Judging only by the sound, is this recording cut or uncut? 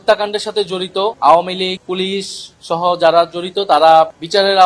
cut